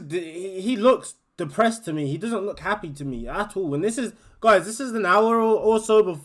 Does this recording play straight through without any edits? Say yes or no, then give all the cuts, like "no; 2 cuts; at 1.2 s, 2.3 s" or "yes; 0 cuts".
yes; 0 cuts